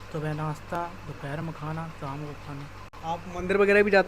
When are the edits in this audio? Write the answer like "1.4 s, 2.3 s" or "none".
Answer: none